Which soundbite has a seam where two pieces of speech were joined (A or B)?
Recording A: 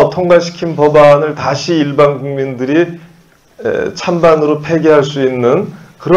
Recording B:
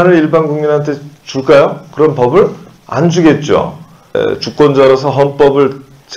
B